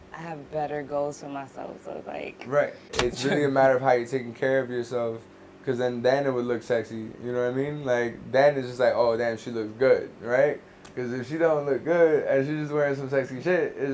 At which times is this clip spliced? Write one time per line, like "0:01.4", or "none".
0:02.9